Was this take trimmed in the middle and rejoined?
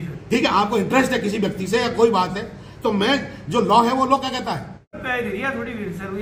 yes; 1 cut; at 5.0 s

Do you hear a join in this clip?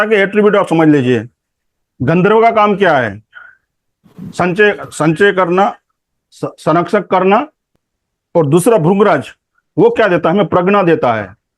yes; 1 cut; at 7.6 s

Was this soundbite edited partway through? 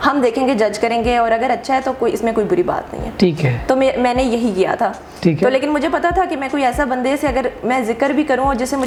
no; 0 cuts

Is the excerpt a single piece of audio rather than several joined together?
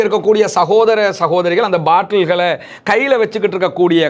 yes; 0 cuts

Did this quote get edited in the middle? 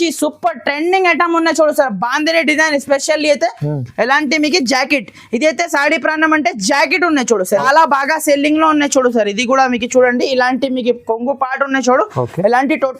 yes; 1 cut; at 7.6 s

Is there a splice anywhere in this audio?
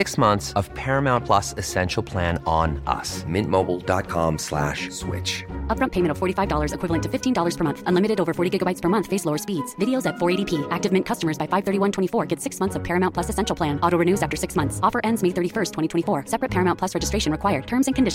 no; 0 cuts

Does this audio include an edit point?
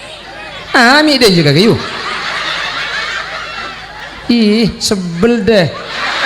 yes; 1 cut; at 4.0 s

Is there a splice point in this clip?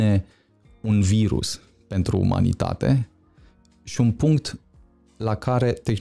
no; 0 cuts

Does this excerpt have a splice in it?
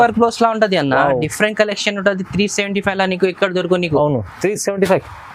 no; 0 cuts

